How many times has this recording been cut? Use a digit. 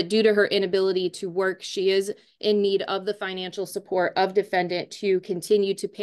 0